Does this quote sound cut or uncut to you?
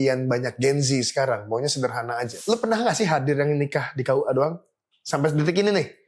cut